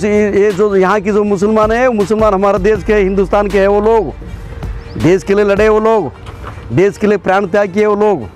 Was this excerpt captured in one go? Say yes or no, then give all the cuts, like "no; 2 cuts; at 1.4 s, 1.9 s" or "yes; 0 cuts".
yes; 0 cuts